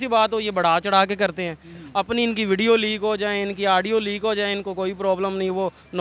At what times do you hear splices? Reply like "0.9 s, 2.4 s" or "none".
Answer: none